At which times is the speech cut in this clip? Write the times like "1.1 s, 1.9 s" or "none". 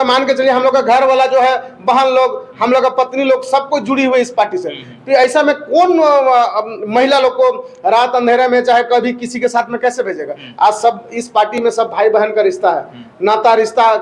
none

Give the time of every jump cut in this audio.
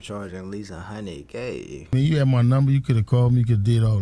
1.9 s

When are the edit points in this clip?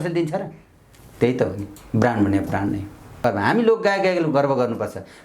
3.2 s

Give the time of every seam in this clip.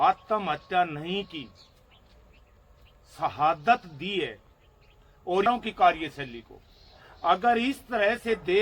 5.5 s

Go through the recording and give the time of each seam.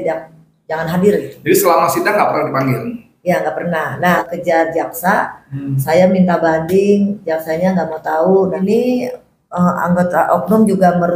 4.2 s, 8.6 s

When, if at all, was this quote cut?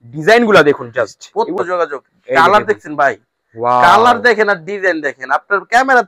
1.6 s

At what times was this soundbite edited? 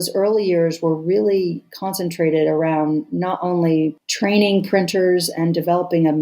4.1 s

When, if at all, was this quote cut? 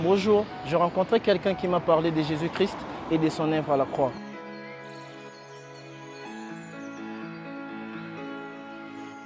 none

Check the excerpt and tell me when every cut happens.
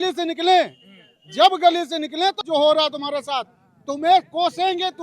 2.4 s

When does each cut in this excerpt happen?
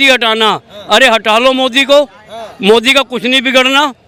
none

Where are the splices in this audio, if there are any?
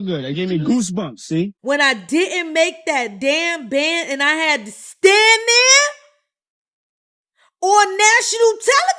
1.6 s

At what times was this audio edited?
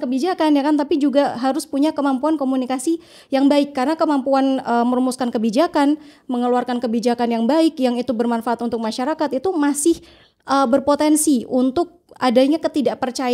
none

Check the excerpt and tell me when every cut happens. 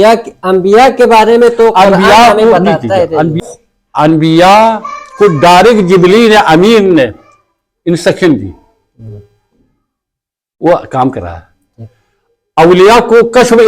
3.4 s

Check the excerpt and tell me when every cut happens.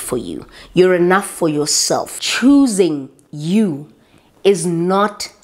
2.2 s

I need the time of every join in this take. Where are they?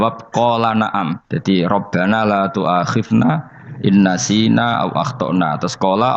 1.3 s

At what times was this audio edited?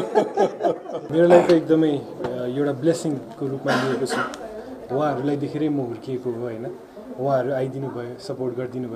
1.0 s

